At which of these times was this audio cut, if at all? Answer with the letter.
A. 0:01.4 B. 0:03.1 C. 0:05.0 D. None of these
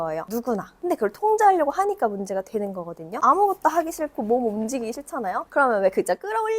B